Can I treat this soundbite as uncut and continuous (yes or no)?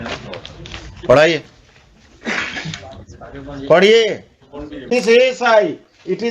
no